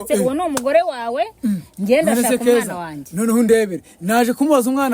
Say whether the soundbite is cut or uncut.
uncut